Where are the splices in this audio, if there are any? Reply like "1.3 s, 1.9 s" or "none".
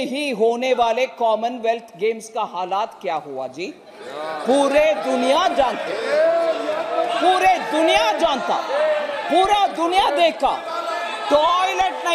none